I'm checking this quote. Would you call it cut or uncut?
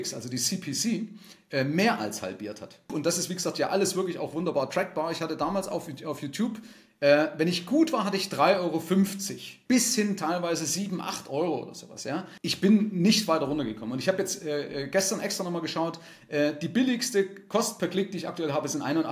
cut